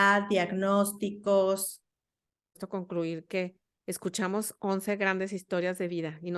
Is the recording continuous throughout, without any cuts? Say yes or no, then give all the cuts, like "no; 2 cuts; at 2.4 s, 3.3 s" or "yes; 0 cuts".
no; 1 cut; at 2.6 s